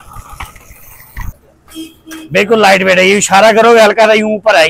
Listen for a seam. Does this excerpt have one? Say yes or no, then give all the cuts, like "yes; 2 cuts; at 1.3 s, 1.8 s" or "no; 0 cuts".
yes; 1 cut; at 1.2 s